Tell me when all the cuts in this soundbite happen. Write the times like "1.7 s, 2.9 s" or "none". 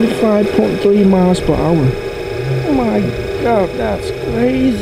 none